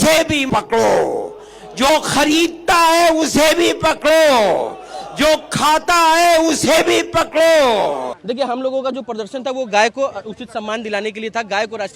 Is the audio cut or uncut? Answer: cut